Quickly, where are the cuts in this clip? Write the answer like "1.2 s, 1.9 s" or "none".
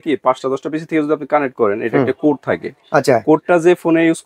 none